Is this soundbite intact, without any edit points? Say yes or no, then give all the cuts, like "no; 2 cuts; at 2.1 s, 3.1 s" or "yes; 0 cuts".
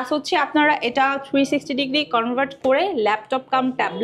yes; 0 cuts